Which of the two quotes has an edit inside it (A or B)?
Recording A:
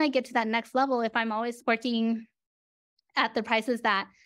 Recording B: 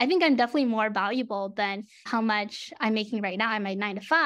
A